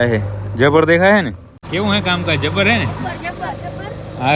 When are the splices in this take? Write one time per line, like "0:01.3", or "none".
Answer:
0:01.5